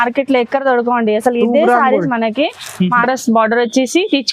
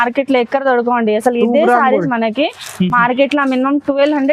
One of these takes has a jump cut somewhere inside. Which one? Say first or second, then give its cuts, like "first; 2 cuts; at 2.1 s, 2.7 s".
first; 1 cut; at 2.9 s